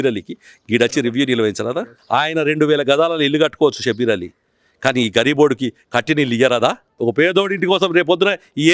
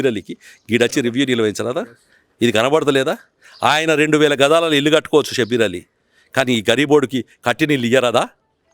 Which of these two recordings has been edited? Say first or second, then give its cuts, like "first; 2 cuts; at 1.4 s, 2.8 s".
first; 2 cuts; at 1.9 s, 6.9 s